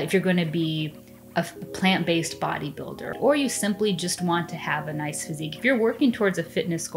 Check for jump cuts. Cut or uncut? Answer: cut